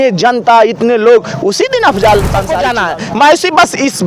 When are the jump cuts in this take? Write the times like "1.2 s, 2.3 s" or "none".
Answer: 2.6 s